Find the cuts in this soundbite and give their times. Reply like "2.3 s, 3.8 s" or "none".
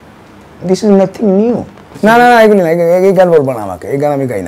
1.9 s